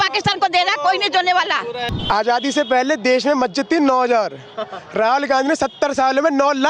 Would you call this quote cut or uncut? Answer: cut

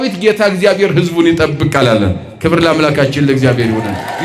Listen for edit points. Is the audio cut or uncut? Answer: uncut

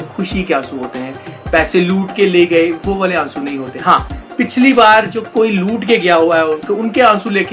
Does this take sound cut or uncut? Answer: uncut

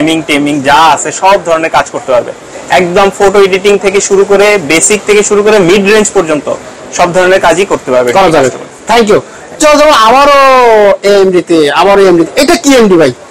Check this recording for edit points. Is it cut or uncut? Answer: uncut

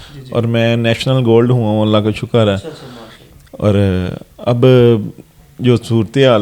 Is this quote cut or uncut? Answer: uncut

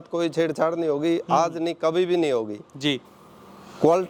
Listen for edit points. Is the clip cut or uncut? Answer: uncut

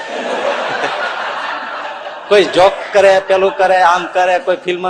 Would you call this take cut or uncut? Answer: uncut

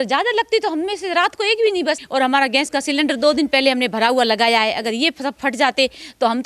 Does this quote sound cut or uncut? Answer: cut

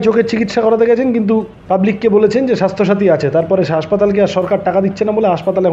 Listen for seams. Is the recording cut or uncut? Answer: cut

